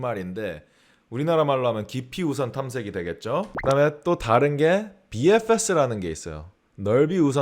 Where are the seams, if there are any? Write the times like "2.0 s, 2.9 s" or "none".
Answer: 3.5 s